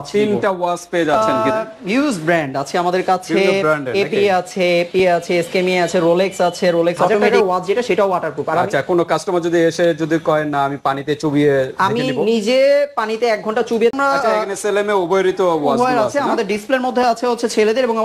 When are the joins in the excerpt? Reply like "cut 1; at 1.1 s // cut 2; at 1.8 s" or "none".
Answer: cut 1; at 1.3 s // cut 2; at 7.3 s // cut 3; at 13.9 s